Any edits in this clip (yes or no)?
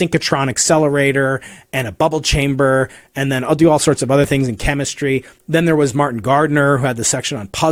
no